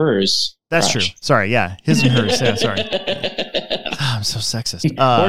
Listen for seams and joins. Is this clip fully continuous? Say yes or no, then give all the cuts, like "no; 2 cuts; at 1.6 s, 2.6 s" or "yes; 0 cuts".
no; 1 cut; at 4.0 s